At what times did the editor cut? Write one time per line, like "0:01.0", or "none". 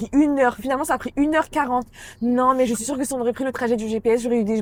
none